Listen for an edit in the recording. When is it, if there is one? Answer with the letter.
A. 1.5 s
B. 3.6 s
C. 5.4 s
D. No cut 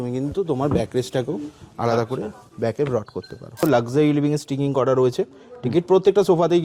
B